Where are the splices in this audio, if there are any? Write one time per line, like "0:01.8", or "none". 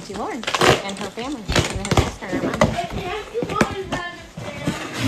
none